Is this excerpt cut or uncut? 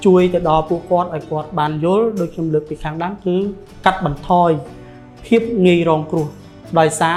uncut